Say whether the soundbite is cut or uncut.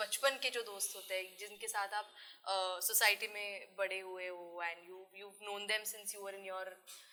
uncut